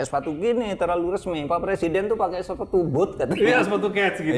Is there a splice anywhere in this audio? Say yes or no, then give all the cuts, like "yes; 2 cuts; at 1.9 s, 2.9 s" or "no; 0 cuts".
no; 0 cuts